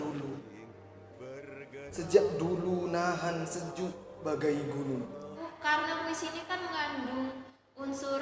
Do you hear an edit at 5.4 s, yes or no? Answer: yes